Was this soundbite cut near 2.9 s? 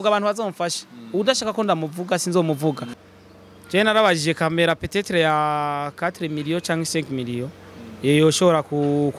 yes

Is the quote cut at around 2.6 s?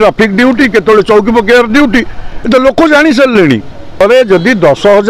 no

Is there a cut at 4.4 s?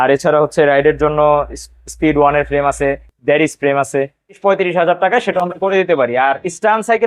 yes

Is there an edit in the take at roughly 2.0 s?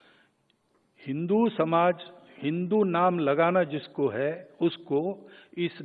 no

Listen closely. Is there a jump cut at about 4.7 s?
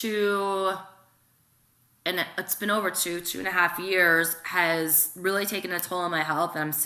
yes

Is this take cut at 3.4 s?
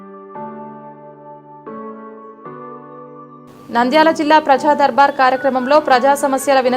yes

